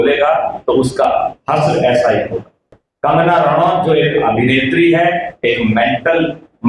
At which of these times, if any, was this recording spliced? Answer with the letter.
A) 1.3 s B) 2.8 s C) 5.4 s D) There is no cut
B